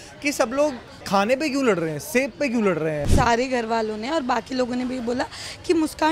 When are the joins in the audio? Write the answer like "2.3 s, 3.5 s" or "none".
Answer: 0.9 s, 3.1 s